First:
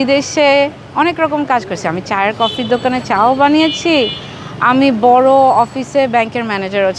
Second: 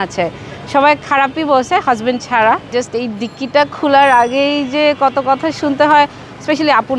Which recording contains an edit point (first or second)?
second